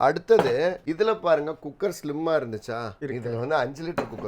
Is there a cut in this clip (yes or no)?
yes